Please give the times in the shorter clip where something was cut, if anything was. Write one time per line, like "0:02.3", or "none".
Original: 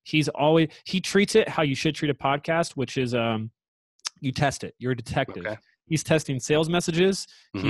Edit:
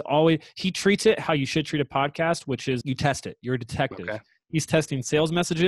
0:02.8